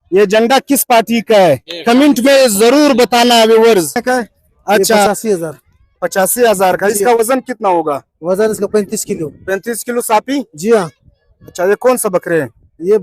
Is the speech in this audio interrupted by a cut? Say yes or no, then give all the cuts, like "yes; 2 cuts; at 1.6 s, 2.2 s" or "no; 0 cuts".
yes; 1 cut; at 5.1 s